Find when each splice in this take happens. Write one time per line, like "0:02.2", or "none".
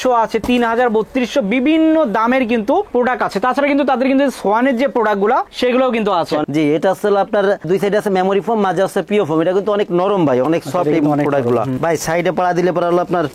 0:06.5
0:11.8

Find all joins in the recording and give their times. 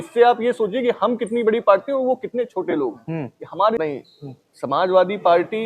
0:03.8

